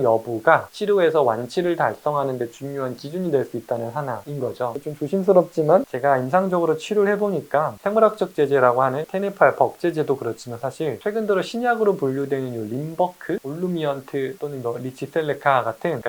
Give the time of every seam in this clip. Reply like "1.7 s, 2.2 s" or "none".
4.8 s, 9.1 s